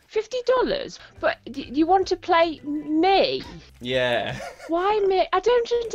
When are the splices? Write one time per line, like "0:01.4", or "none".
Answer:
0:00.9